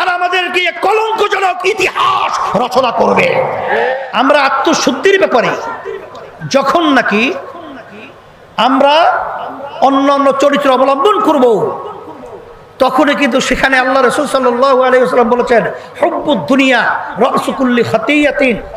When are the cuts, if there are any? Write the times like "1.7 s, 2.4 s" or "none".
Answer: 3.9 s